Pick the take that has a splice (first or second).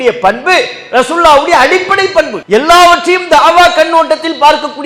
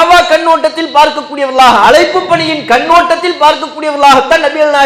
first